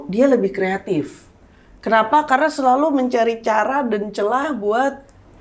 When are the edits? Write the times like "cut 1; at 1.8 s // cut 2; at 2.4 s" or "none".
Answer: none